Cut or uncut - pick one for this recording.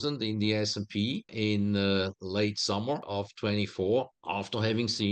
cut